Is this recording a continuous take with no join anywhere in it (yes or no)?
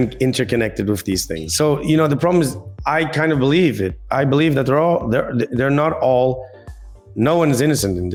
yes